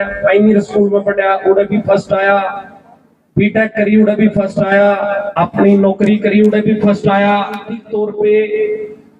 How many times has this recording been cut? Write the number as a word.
two